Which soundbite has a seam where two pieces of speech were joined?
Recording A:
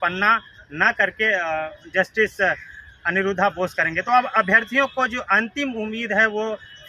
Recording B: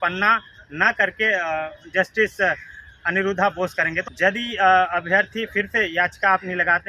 B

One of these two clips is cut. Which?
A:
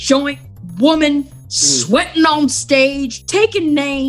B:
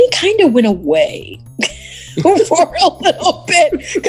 A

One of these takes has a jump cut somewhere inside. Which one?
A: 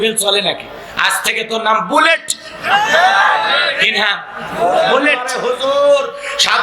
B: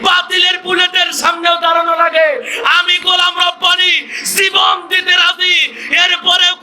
A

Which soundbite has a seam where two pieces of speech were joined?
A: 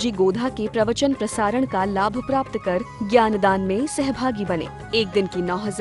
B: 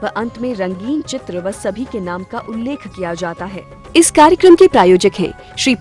B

